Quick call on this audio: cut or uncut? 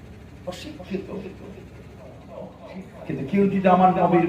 cut